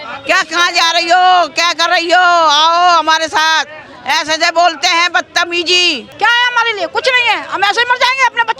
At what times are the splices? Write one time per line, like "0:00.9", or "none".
0:06.1